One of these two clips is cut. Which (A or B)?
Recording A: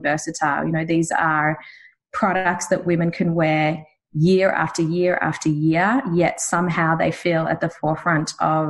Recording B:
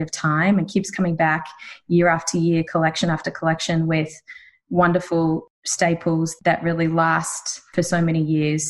B